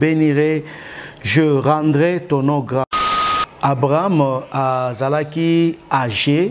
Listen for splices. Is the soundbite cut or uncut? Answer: cut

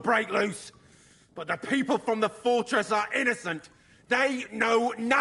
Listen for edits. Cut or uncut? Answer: uncut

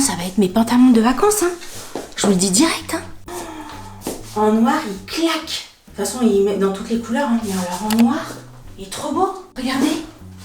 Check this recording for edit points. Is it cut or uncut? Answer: uncut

